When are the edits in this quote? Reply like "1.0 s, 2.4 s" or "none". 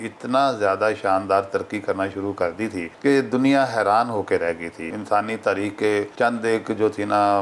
2.9 s, 4.9 s, 6.1 s